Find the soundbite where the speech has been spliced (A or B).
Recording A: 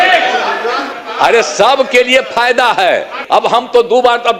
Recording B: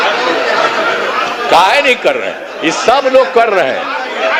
A